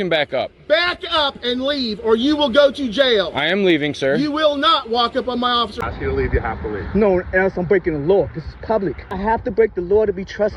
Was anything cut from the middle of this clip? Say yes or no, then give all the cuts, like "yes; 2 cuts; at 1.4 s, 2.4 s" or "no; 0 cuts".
yes; 2 cuts; at 5.8 s, 9.0 s